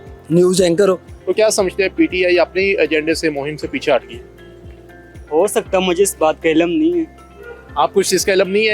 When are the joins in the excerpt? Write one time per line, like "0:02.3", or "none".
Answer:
0:01.1